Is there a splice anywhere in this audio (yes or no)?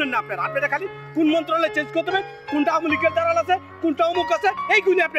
no